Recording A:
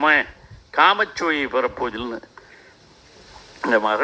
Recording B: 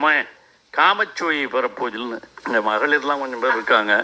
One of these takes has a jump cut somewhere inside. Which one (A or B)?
B